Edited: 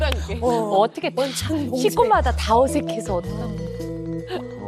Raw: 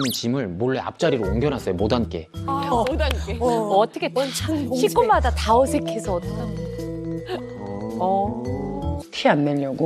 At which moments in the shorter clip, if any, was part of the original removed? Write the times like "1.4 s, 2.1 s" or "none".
none